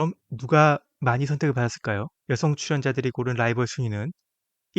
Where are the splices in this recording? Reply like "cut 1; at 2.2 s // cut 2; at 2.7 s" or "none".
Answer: cut 1; at 2.1 s